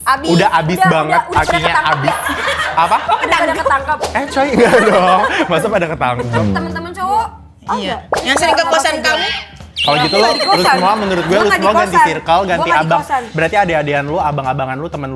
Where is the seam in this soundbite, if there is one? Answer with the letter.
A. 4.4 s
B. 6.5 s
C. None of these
B